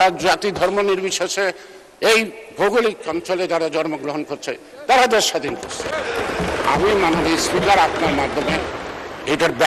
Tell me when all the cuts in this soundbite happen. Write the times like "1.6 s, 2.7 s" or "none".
none